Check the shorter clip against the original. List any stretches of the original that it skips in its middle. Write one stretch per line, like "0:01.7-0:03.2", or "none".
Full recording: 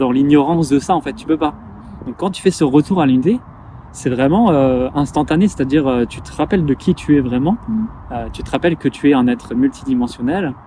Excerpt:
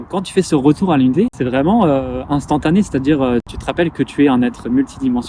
0:03.5-0:04.0
0:06.2-0:08.4